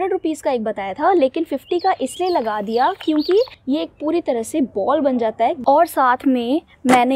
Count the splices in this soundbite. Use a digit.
2